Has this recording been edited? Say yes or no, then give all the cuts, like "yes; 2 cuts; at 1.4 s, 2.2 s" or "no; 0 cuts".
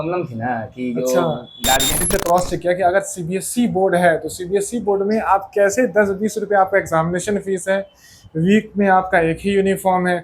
yes; 1 cut; at 2.0 s